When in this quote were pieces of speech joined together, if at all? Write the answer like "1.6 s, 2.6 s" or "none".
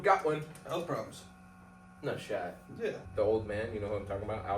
3.0 s